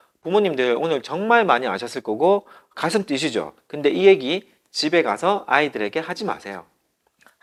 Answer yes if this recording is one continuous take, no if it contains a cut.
yes